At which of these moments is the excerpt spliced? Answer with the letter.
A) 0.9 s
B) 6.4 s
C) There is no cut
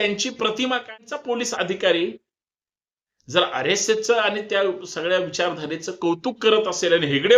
A